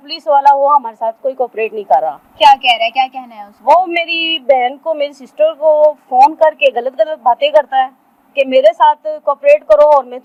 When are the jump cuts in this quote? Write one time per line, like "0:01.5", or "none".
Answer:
none